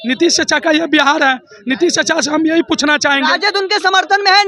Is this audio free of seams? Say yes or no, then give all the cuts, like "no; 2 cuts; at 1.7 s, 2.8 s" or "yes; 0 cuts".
yes; 0 cuts